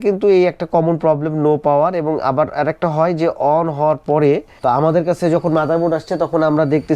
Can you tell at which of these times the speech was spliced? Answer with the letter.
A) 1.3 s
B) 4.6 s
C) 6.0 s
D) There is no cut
B